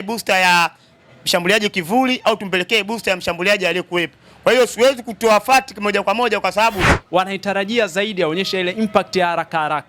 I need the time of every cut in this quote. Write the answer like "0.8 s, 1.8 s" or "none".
7.0 s